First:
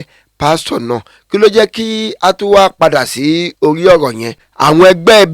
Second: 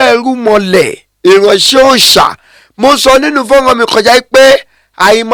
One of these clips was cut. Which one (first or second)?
first